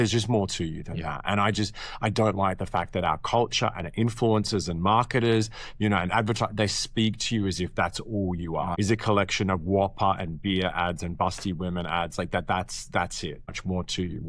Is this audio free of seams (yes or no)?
no